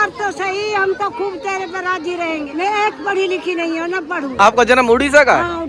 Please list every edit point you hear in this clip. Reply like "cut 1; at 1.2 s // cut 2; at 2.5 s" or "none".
cut 1; at 2.5 s // cut 2; at 4.3 s